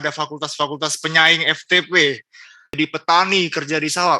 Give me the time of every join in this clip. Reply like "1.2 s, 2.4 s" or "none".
2.8 s